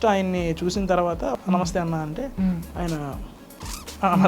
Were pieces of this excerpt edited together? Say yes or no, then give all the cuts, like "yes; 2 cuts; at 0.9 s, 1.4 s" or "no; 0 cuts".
yes; 1 cut; at 1.3 s